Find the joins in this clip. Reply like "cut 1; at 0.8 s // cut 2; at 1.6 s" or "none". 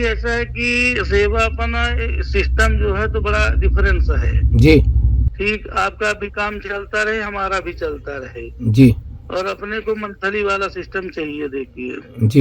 cut 1; at 5.3 s